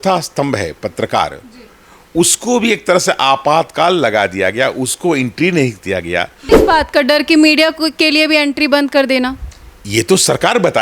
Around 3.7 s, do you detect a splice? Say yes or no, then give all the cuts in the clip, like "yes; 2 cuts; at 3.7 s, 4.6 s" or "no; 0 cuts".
no; 1 cut; at 6.4 s